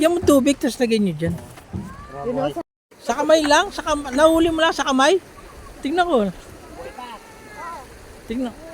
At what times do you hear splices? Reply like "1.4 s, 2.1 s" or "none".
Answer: 2.6 s